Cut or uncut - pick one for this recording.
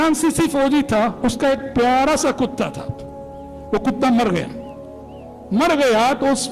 uncut